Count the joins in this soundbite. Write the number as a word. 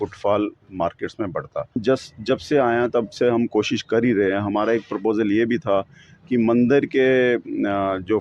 one